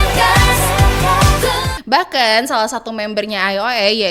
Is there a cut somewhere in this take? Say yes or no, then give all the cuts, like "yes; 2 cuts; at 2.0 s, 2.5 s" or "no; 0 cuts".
yes; 1 cut; at 1.8 s